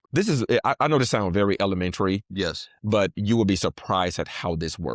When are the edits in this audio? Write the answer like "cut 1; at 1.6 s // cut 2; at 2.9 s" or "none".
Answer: none

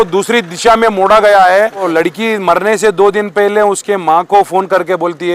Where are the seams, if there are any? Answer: cut 1; at 1.9 s

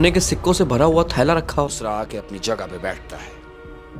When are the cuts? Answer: cut 1; at 1.7 s

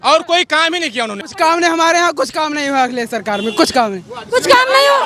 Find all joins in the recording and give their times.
cut 1; at 1.2 s

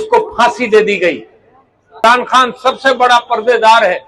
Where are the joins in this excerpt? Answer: cut 1; at 2.0 s

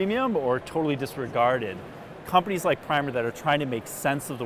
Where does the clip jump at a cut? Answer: cut 1; at 2.1 s

